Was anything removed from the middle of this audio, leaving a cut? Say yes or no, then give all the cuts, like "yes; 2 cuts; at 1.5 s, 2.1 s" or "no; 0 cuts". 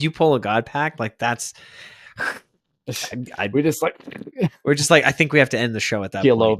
no; 0 cuts